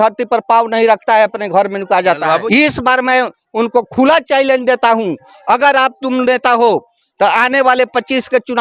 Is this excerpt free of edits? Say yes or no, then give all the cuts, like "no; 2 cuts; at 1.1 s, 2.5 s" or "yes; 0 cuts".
no; 1 cut; at 2.4 s